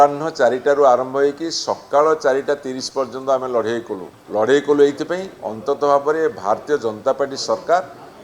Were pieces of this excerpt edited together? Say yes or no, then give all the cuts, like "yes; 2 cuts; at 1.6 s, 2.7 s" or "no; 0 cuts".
yes; 1 cut; at 4.1 s